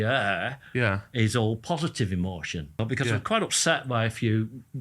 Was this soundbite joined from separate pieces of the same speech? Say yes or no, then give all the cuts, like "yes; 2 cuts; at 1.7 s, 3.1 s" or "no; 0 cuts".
yes; 1 cut; at 2.8 s